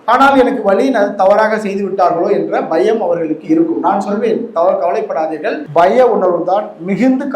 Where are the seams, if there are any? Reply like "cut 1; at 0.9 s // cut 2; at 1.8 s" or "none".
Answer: cut 1; at 5.6 s